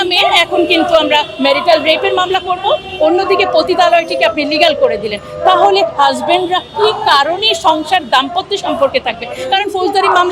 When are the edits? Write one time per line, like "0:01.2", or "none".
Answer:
none